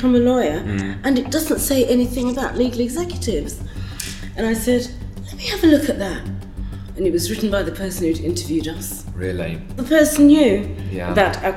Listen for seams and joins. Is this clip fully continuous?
no; 1 cut; at 9.8 s

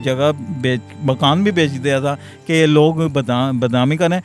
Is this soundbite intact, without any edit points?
yes; 0 cuts

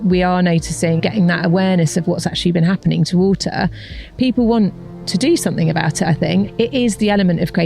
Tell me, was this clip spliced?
yes; 2 cuts; at 1.0 s, 6.5 s

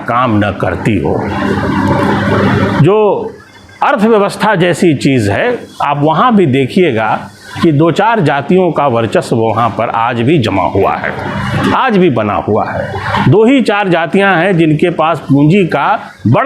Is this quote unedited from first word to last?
yes; 0 cuts

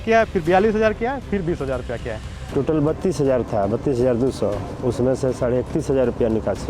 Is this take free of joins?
no; 1 cut; at 2.5 s

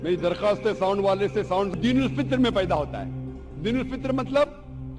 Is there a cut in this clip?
yes; 1 cut; at 1.7 s

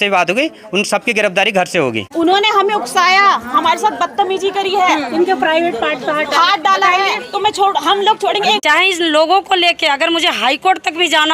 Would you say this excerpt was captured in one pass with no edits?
no; 2 cuts; at 2.0 s, 8.6 s

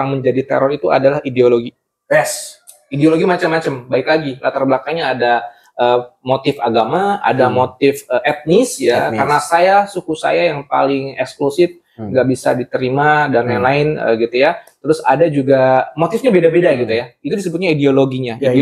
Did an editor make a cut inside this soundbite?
no; 0 cuts

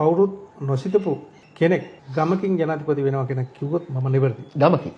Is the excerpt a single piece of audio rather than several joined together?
no; 2 cuts; at 1.4 s, 2.0 s

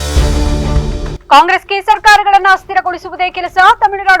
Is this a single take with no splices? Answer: no; 1 cut; at 1.1 s

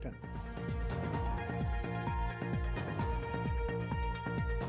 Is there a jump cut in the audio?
no; 0 cuts

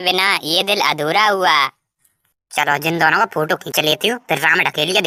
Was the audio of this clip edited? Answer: no; 0 cuts

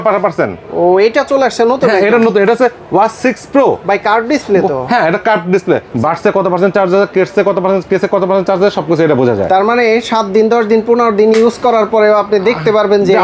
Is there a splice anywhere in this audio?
yes; 1 cut; at 5.9 s

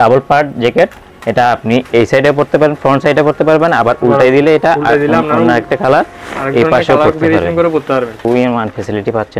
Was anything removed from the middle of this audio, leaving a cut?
yes; 1 cut; at 8.2 s

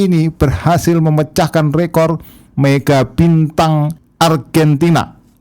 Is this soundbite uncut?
no; 1 cut; at 4.0 s

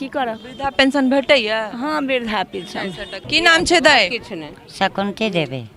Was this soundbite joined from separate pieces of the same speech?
yes; 1 cut; at 3.2 s

